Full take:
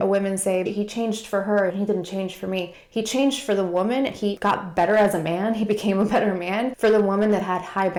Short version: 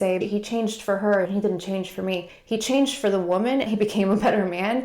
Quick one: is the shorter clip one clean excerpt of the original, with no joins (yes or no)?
no